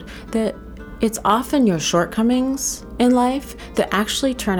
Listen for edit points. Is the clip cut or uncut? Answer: uncut